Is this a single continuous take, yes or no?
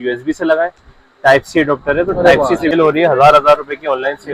no